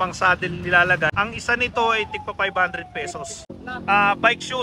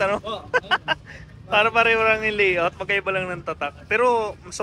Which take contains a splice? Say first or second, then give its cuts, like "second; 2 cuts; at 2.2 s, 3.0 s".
first; 2 cuts; at 1.1 s, 3.5 s